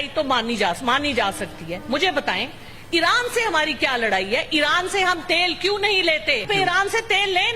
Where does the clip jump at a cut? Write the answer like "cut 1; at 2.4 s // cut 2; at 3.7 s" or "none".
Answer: cut 1; at 6.4 s